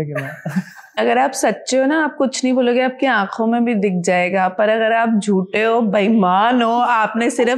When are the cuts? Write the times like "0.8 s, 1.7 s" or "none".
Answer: 0.9 s